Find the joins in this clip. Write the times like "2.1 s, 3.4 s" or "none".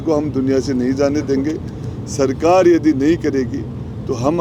none